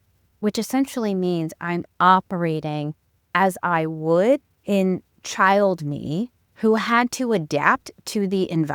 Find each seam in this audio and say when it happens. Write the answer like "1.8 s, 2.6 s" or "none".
4.5 s, 6.4 s